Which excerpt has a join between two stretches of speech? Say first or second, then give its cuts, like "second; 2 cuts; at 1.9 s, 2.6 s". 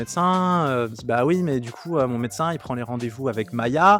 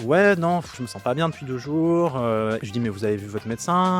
second; 2 cuts; at 0.8 s, 2.6 s